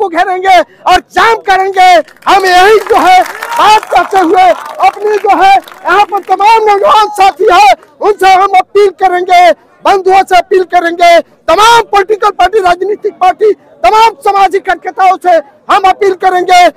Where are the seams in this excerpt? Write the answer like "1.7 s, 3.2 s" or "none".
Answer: none